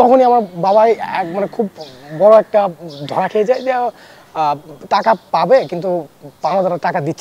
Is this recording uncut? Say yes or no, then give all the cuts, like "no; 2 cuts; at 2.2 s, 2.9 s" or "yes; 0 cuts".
yes; 0 cuts